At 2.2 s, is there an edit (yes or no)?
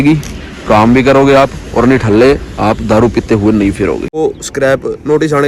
no